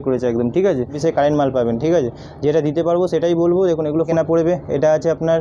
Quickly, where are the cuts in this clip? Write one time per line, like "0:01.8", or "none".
0:00.9
0:04.1